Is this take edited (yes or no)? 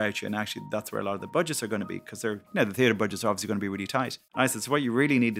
yes